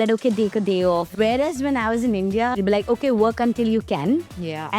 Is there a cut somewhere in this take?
yes; 2 cuts; at 1.1 s, 2.6 s

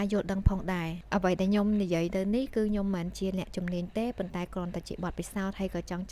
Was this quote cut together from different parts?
yes; 1 cut; at 1.0 s

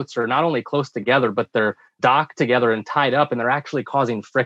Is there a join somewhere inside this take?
yes; 1 cut; at 2.0 s

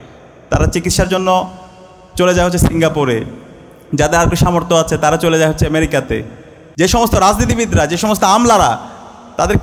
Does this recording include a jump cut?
yes; 1 cut; at 6.6 s

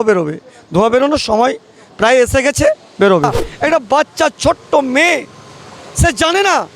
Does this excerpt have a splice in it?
yes; 1 cut; at 3.4 s

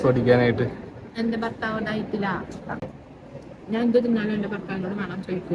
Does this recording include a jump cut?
yes; 1 cut; at 2.8 s

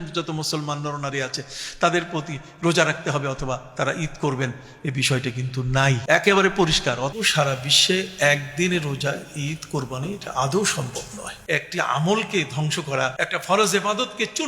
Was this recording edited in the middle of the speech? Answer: yes; 4 cuts; at 6.0 s, 7.1 s, 11.3 s, 13.2 s

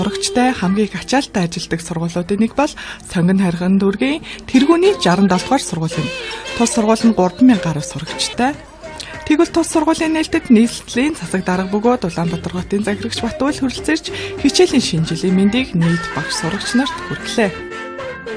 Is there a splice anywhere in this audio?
yes; 1 cut; at 11.6 s

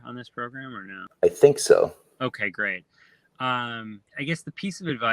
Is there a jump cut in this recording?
yes; 2 cuts; at 1.0 s, 4.1 s

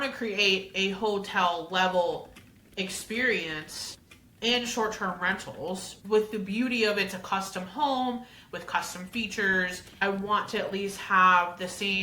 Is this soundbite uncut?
no; 2 cuts; at 6.0 s, 10.0 s

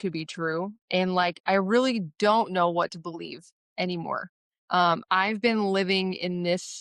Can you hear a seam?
no; 0 cuts

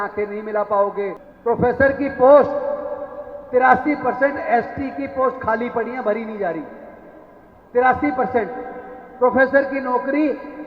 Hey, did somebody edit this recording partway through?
yes; 1 cut; at 1.2 s

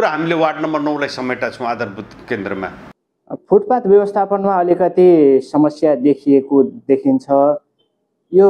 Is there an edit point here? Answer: no; 0 cuts

